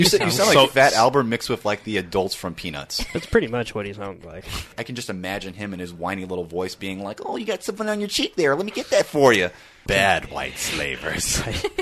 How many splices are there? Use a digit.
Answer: 2